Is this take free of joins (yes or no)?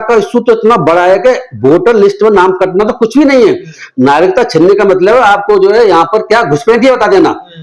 yes